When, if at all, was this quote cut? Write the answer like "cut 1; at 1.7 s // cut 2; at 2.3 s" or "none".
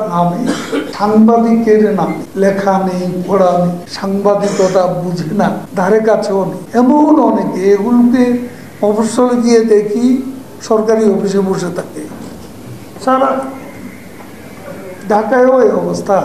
cut 1; at 0.9 s // cut 2; at 2.2 s // cut 3; at 3.9 s // cut 4; at 5.6 s // cut 5; at 6.6 s